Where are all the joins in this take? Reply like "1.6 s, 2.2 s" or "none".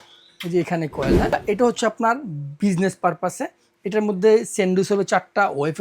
1.3 s